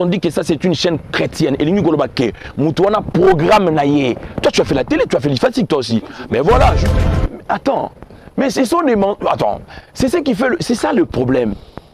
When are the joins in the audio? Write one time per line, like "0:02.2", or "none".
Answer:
0:06.9